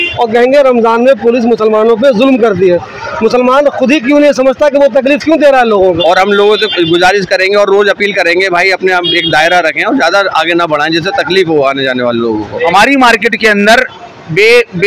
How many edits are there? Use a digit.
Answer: 2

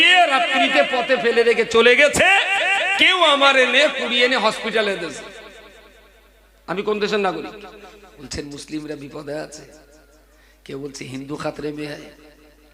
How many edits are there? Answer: 1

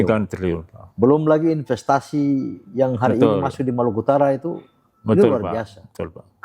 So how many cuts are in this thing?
0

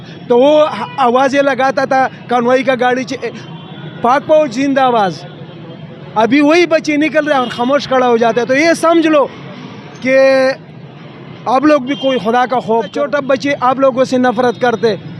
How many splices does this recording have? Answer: 1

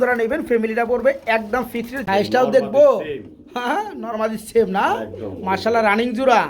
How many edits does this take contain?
1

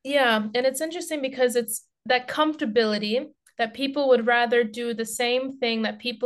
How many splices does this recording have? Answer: 0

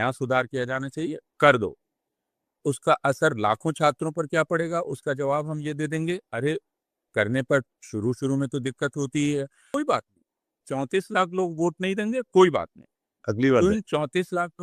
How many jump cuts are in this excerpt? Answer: 1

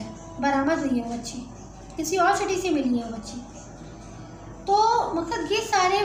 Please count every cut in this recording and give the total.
0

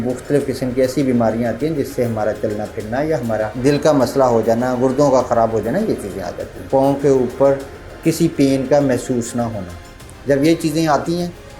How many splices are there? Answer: 1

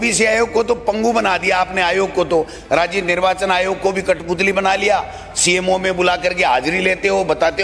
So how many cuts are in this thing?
0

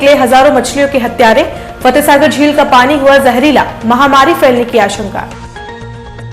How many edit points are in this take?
1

